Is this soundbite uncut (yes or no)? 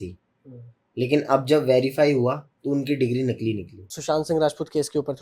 no